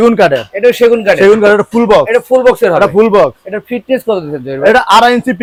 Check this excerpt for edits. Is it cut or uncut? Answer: uncut